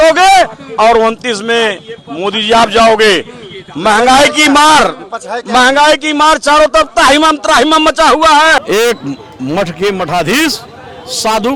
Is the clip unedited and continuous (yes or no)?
yes